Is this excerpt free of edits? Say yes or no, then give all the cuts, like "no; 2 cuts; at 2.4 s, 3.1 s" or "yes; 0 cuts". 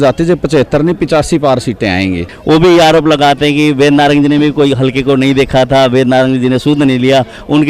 no; 1 cut; at 2.3 s